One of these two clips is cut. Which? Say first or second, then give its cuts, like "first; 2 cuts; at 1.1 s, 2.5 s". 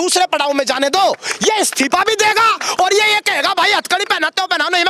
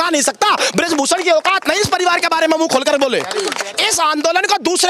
second; 1 cut; at 3.6 s